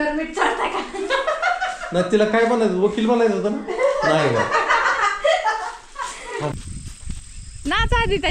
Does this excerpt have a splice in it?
yes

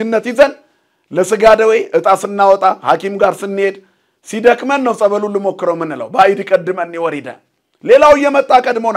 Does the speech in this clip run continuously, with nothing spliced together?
yes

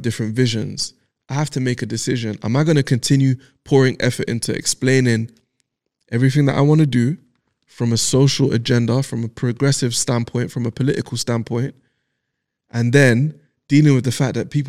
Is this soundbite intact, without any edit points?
yes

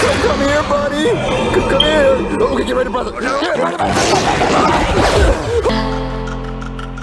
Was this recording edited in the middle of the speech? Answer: yes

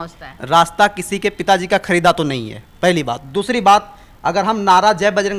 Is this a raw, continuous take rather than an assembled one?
yes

